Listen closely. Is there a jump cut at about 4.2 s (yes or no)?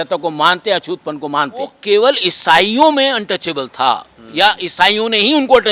no